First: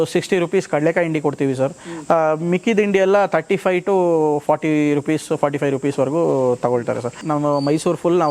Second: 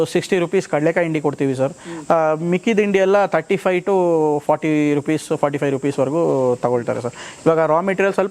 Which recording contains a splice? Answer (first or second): first